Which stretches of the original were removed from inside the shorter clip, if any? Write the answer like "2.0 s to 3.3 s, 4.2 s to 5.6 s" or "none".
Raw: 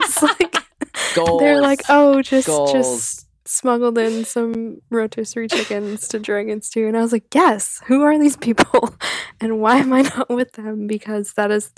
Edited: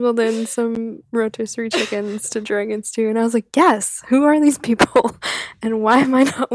none